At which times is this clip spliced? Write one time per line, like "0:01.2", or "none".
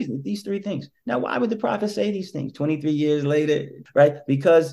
0:03.8